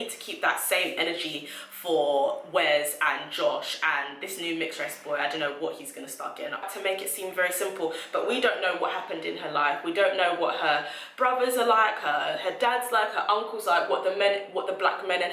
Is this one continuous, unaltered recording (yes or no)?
no